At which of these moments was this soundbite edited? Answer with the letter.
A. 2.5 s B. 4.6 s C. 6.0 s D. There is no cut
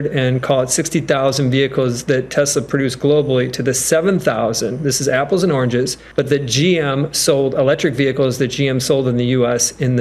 C